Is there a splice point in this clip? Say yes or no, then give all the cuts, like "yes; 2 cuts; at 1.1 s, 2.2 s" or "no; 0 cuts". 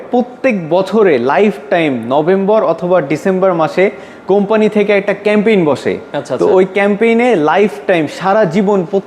no; 0 cuts